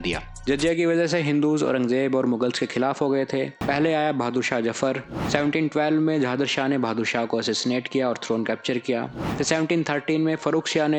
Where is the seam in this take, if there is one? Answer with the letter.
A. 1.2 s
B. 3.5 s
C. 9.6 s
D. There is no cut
B